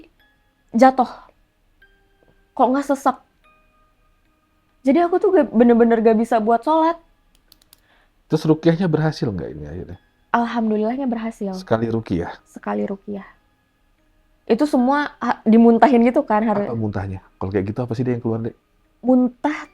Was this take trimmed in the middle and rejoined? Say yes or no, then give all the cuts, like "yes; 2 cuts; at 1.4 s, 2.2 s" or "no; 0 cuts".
no; 0 cuts